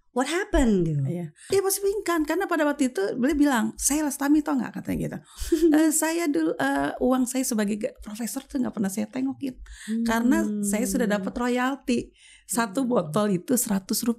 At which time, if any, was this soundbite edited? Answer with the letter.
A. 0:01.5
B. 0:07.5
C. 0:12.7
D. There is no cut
A